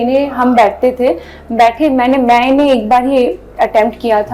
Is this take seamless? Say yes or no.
yes